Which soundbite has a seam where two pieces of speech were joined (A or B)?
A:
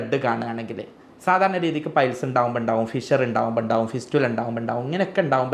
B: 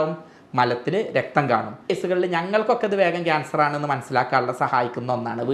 B